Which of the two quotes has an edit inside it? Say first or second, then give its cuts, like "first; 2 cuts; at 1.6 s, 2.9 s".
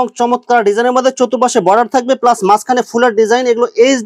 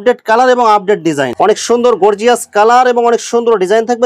second; 1 cut; at 1.3 s